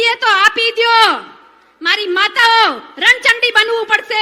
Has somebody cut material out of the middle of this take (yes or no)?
no